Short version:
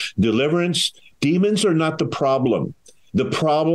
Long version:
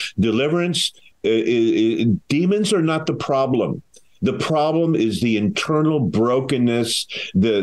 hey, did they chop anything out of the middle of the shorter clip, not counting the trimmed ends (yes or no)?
yes